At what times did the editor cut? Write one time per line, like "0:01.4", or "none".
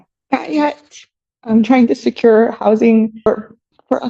0:03.2